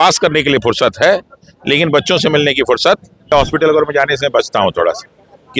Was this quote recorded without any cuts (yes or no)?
no